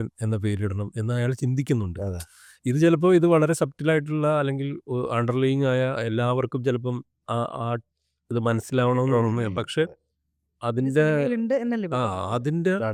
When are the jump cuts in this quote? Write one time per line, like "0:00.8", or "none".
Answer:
none

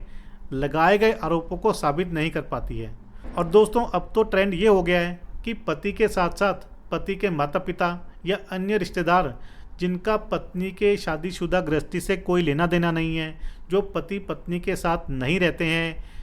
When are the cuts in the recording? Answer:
none

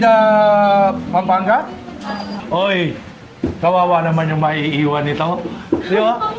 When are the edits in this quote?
0:02.3

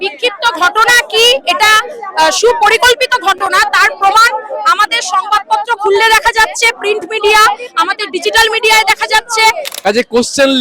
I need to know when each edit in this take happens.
0:09.7

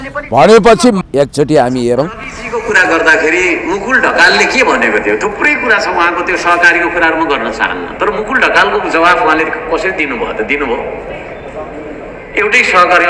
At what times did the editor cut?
0:01.0

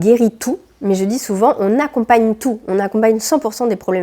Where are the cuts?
none

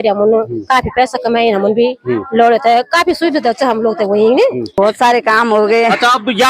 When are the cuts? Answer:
0:04.7

